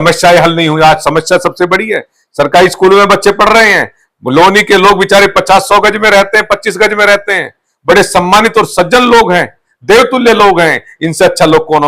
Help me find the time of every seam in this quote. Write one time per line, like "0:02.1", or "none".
none